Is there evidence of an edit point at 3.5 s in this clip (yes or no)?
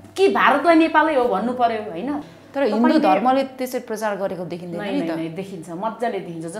no